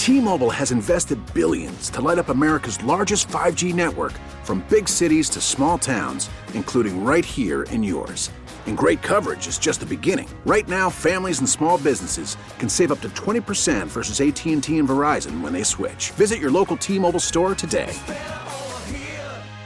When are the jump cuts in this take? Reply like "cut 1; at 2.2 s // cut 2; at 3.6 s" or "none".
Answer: none